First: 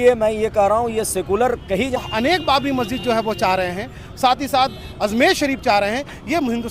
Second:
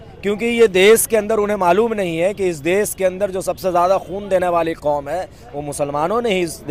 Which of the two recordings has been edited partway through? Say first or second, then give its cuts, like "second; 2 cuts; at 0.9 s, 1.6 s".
first; 1 cut; at 2.0 s